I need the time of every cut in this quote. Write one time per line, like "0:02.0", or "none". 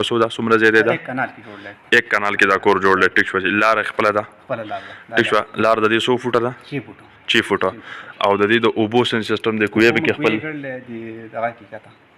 none